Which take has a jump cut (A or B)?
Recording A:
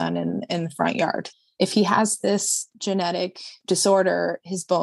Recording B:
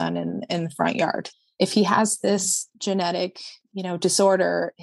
A